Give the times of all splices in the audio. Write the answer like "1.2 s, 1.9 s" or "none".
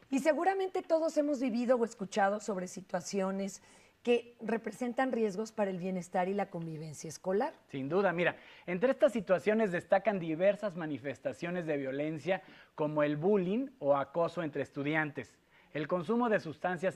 4.5 s